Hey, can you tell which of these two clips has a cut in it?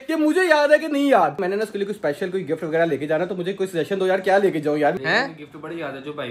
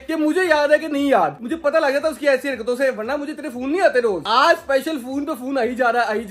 first; 2 cuts; at 1.4 s, 5.0 s

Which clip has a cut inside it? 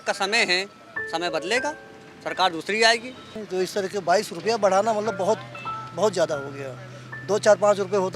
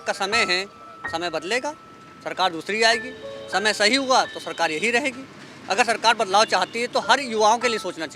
first; 1 cut; at 3.3 s

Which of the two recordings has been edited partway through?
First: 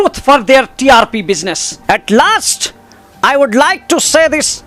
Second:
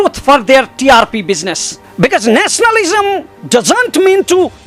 first; 1 cut; at 1.7 s

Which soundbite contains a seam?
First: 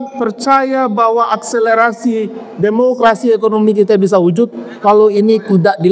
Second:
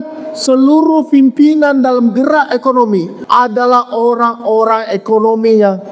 second; 1 cut; at 3.2 s

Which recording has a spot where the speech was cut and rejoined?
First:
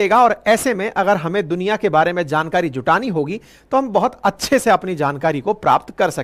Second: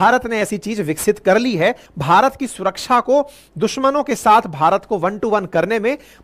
second; 1 cut; at 1.8 s

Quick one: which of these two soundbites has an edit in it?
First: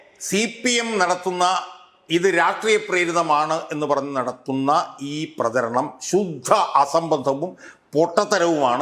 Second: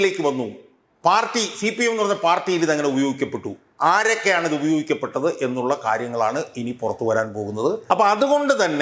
second; 1 cut; at 7.8 s

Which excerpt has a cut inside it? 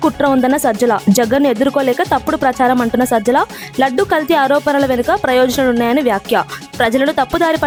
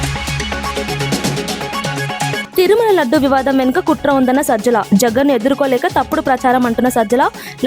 second; 1 cut; at 2.5 s

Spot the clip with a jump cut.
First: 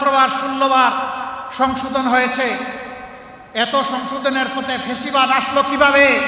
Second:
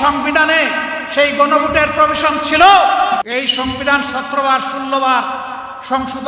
second; 1 cut; at 3.2 s

